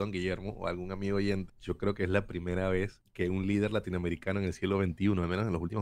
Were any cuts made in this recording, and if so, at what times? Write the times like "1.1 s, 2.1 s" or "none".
1.5 s, 3.0 s